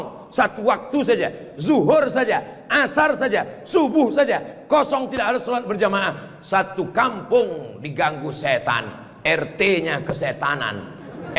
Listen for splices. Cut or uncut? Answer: uncut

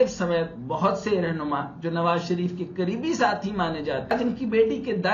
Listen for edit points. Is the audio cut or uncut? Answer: cut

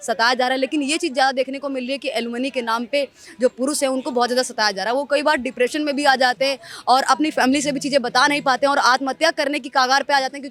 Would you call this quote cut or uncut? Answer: uncut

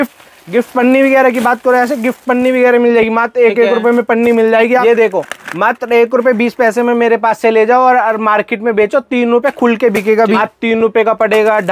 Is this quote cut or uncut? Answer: cut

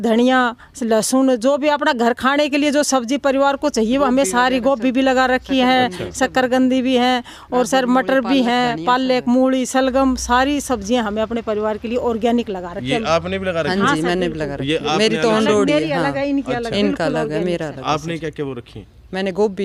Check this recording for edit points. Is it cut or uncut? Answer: uncut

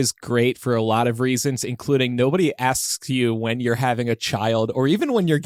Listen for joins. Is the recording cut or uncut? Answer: uncut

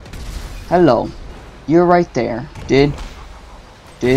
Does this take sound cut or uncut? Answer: cut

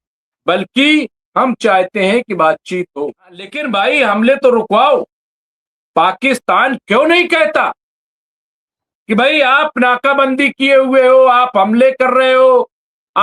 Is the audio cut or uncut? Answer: cut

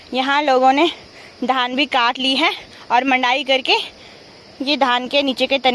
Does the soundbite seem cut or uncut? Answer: uncut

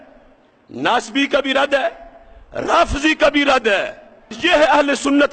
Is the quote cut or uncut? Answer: cut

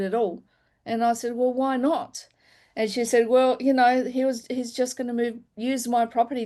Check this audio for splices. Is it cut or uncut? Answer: uncut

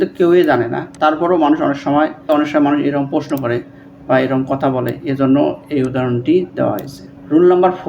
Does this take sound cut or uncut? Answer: cut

